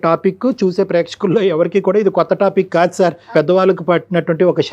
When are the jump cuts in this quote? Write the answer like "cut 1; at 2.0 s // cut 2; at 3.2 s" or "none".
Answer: cut 1; at 3.3 s